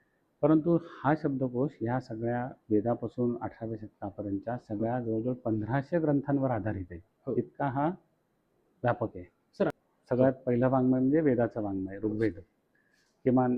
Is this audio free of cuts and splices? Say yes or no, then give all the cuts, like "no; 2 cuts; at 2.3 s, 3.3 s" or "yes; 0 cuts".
no; 1 cut; at 9.7 s